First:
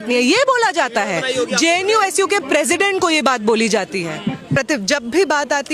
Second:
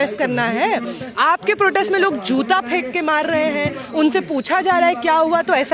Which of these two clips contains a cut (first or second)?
first